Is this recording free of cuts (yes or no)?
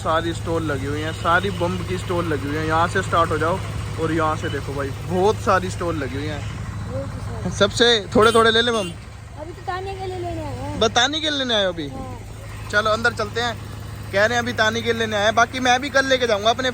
yes